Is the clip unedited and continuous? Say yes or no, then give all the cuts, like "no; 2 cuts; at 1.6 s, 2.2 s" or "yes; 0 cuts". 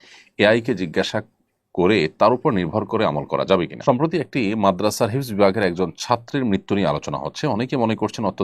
no; 1 cut; at 3.7 s